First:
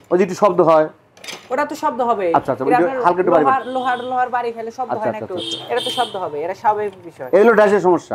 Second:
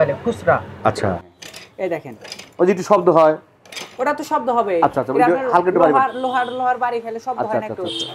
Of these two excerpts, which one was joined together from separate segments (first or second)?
second